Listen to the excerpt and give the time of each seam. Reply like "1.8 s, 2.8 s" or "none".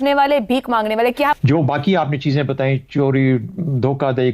1.3 s